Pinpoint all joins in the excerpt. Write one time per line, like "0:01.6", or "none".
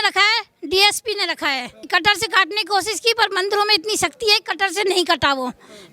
0:01.9